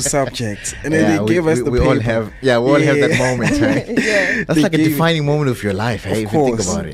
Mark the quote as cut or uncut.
uncut